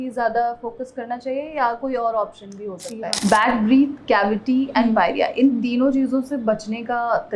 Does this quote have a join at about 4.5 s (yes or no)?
no